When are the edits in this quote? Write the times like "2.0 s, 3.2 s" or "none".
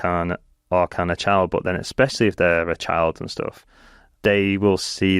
none